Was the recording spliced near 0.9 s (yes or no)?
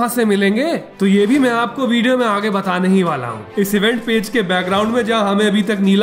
yes